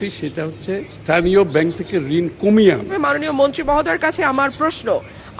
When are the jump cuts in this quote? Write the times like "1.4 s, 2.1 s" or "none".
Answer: 0.9 s, 2.9 s